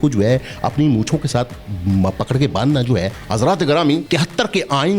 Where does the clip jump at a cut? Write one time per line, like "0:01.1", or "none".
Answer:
0:03.2
0:04.0